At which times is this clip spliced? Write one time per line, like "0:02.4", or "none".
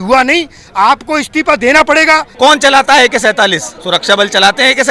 0:02.3
0:03.7